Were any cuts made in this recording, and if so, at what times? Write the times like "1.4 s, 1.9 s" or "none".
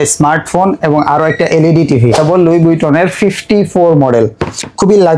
2.2 s